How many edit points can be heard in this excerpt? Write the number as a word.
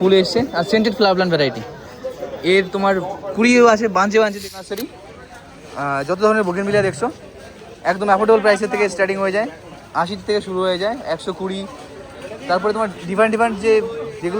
one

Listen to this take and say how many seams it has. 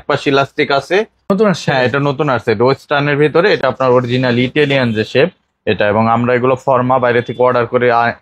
two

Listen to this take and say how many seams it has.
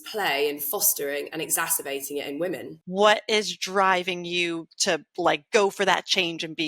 one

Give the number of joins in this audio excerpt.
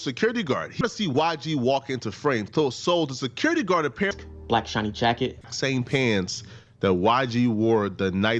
three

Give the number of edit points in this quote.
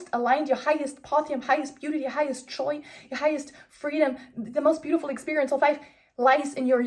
zero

